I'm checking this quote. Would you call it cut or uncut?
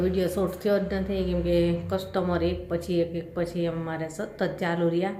uncut